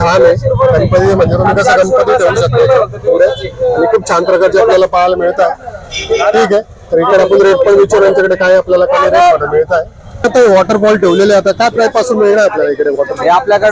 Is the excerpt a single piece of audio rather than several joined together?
yes; 0 cuts

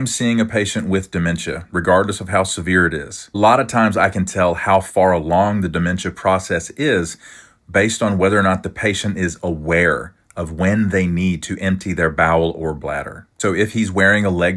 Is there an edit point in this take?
no; 0 cuts

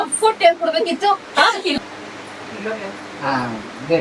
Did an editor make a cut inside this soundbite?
yes; 1 cut; at 1.8 s

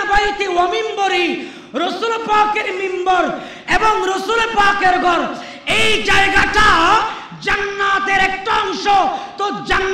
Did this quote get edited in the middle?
no; 0 cuts

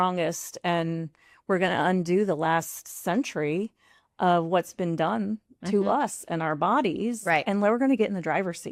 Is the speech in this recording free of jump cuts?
yes; 0 cuts

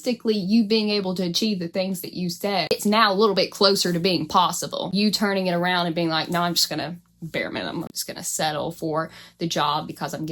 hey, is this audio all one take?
no; 3 cuts; at 2.7 s, 4.9 s, 8.0 s

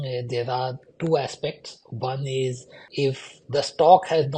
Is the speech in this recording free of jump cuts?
no; 1 cut; at 2.8 s

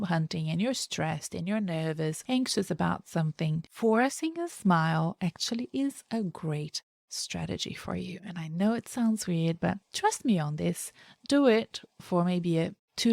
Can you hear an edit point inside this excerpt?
yes; 2 cuts; at 2.2 s, 3.7 s

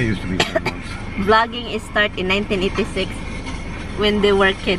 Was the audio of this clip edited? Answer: no; 0 cuts

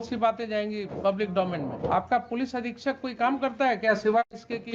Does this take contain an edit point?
yes; 2 cuts; at 0.9 s, 1.9 s

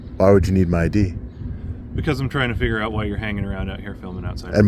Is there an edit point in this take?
no; 0 cuts

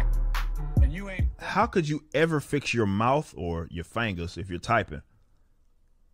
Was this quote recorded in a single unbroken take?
no; 1 cut; at 1.3 s

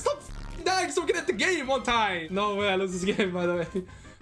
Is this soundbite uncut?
no; 1 cut; at 2.2 s

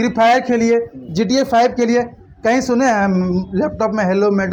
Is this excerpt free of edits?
yes; 0 cuts

